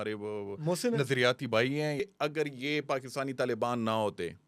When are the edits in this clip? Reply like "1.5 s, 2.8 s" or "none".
2.0 s